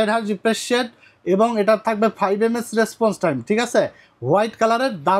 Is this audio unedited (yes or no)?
yes